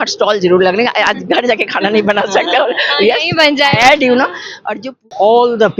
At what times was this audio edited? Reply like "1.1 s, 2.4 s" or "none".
4.8 s